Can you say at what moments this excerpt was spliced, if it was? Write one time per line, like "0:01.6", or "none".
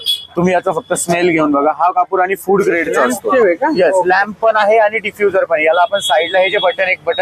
0:03.2